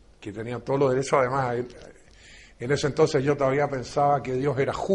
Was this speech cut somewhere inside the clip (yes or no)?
no